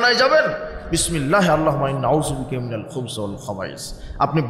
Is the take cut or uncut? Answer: uncut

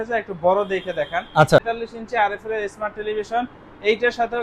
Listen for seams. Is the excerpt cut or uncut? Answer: cut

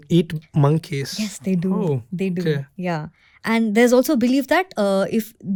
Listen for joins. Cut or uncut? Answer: uncut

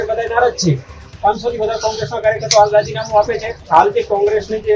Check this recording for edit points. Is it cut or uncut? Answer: cut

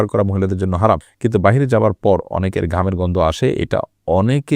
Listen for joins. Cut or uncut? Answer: cut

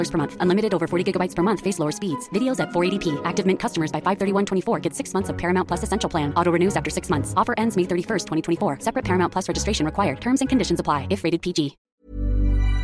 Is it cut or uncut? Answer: cut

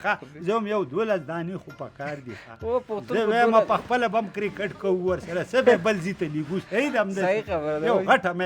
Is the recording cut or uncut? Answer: uncut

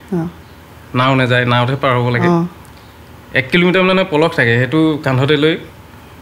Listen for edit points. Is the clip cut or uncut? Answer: uncut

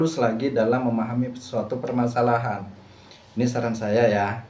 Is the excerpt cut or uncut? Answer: uncut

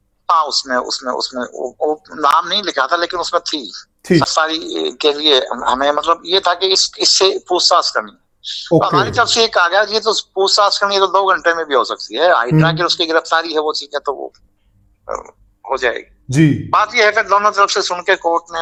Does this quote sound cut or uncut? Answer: uncut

